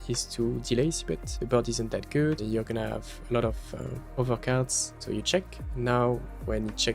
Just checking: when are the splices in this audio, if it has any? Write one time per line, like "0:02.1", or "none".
0:01.3
0:02.4
0:04.0
0:04.9